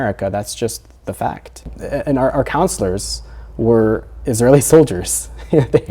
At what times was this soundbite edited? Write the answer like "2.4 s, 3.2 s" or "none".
1.8 s